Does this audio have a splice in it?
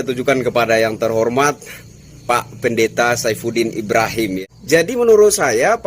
yes; 1 cut; at 4.4 s

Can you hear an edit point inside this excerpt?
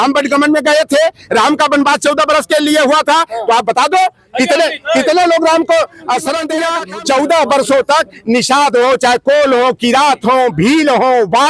yes; 1 cut; at 6.8 s

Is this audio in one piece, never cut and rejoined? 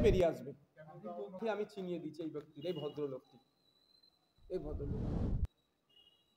no; 1 cut; at 1.4 s

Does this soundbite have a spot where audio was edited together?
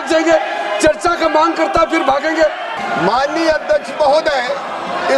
yes; 1 cut; at 2.7 s

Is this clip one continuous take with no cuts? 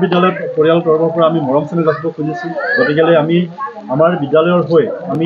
yes; 0 cuts

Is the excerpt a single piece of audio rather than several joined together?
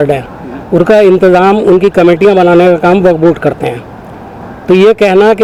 yes; 0 cuts

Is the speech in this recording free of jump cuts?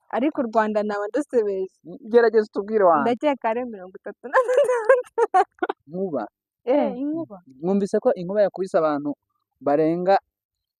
no; 1 cut; at 5.8 s

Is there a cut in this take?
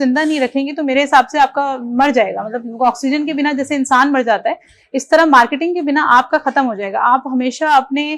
no; 0 cuts

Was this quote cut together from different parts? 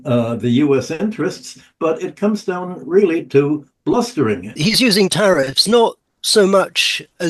yes; 1 cut; at 4.5 s

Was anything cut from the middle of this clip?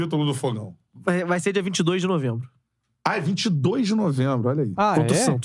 no; 0 cuts

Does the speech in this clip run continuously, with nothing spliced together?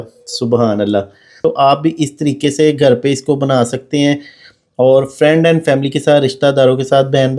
no; 1 cut; at 1.4 s

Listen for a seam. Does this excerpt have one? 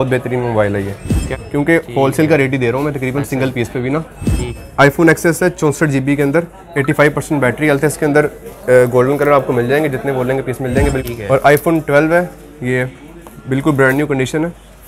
yes; 3 cuts; at 1.3 s, 4.5 s, 11.0 s

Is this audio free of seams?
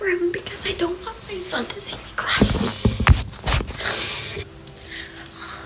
yes; 0 cuts

